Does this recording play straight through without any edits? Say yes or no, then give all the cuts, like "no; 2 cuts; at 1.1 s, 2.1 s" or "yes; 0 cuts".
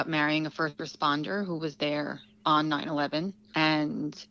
no; 2 cuts; at 2.2 s, 3.4 s